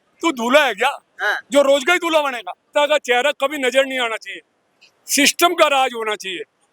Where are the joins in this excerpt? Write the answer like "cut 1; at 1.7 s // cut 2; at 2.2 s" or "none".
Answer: cut 1; at 2.7 s